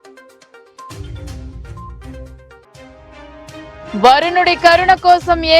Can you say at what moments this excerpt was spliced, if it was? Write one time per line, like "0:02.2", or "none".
0:01.2